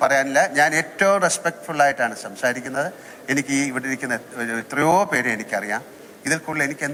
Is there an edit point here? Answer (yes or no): no